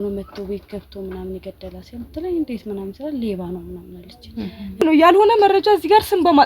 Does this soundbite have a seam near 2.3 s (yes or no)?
no